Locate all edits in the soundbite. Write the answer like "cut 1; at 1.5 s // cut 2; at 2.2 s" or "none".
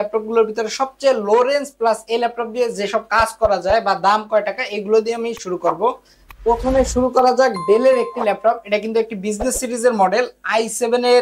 none